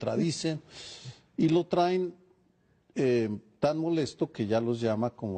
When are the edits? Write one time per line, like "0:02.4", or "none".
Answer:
0:04.3